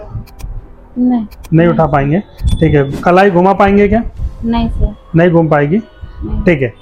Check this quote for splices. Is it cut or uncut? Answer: uncut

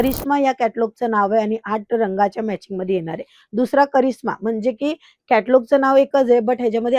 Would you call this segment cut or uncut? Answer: uncut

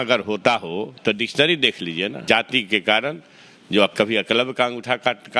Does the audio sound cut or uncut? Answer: cut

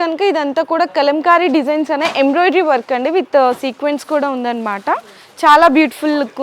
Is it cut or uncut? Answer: uncut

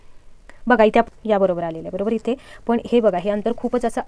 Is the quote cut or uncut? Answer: cut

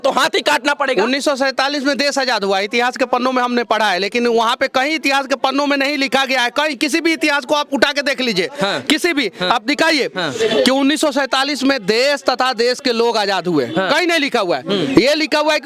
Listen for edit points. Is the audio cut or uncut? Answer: uncut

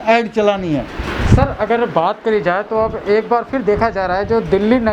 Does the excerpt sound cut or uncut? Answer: uncut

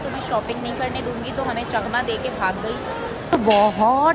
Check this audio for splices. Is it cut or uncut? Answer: cut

